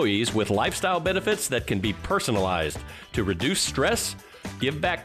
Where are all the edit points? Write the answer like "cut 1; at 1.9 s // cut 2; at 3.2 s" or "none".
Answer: none